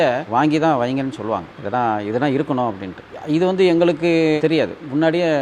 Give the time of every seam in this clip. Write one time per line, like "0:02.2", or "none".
none

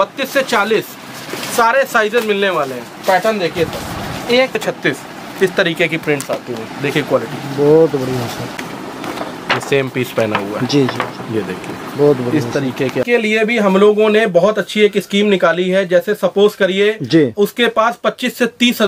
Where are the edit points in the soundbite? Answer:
0:04.6
0:08.6
0:13.0

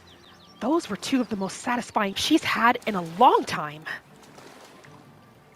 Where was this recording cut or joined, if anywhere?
0:02.2

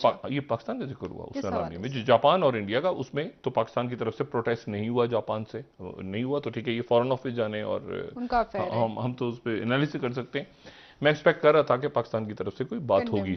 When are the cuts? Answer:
none

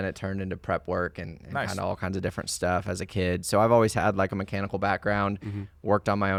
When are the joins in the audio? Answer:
none

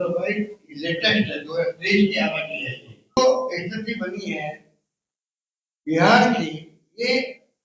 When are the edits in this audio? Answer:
0:03.2

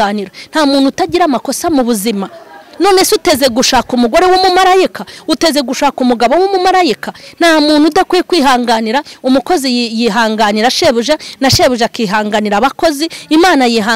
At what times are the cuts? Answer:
none

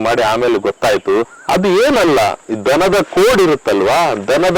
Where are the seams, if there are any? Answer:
0:01.4

